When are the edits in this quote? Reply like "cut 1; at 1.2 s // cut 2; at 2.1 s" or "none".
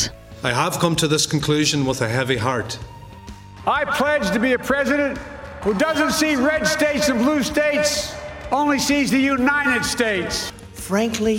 cut 1; at 3.1 s // cut 2; at 5.5 s // cut 3; at 10.4 s